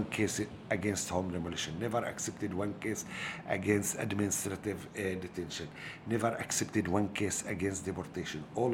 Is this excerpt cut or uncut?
uncut